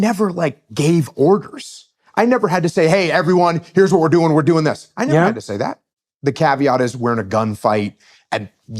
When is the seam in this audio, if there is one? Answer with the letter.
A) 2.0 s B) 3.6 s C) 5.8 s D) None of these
C